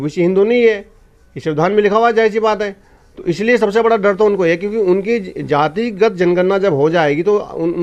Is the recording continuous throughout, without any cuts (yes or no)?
yes